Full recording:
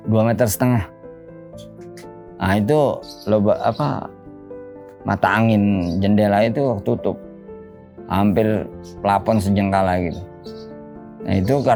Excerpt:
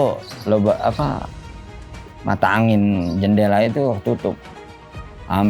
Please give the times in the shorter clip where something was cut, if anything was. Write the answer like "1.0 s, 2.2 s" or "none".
none